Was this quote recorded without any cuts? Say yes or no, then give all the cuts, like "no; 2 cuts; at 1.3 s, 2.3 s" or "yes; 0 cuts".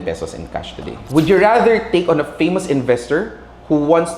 no; 1 cut; at 0.9 s